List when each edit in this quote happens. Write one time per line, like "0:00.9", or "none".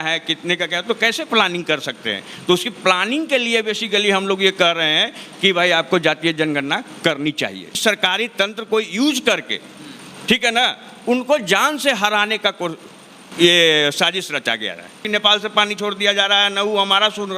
0:07.8
0:15.0